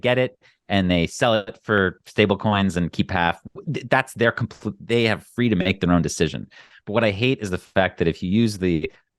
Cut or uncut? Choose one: uncut